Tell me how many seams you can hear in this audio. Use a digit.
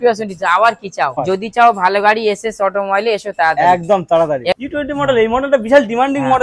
2